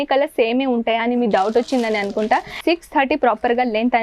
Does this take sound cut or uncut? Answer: cut